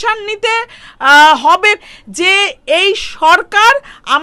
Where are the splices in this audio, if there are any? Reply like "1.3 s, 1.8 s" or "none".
1.8 s